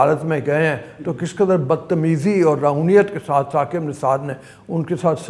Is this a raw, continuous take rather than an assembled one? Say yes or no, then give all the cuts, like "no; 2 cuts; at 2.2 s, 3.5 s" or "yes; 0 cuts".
yes; 0 cuts